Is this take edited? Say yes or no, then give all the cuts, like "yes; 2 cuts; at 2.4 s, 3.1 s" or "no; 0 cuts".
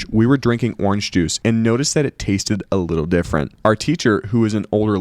yes; 2 cuts; at 1.3 s, 3.5 s